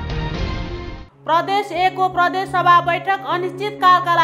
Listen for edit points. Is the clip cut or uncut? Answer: cut